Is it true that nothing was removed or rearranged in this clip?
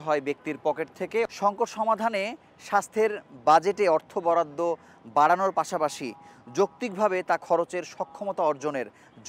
no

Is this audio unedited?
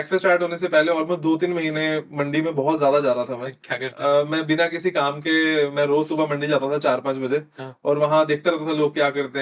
yes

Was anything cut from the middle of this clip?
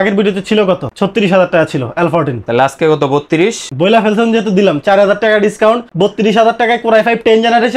no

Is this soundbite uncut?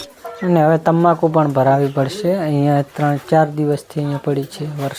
yes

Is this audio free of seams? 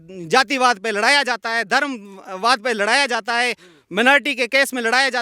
yes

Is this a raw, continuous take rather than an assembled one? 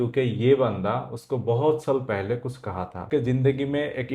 no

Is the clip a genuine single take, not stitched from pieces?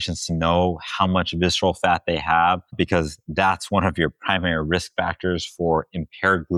yes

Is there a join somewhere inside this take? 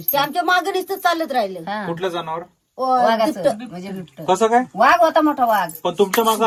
no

